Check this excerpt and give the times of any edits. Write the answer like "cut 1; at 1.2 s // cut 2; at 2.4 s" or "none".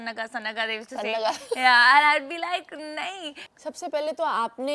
cut 1; at 3.4 s